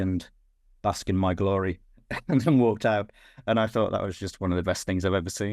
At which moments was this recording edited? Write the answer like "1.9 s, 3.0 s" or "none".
none